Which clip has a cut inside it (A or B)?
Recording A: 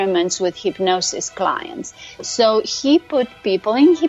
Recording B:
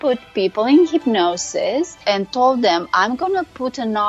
B